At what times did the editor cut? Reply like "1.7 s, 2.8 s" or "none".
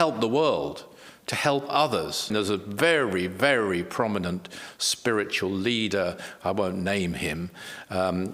2.3 s